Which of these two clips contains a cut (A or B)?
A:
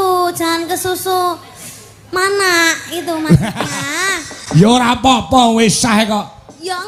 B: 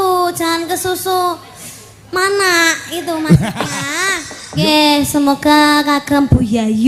B